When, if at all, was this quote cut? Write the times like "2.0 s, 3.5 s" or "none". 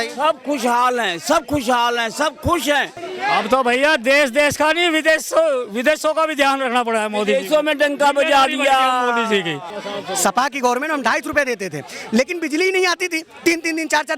3.0 s, 9.8 s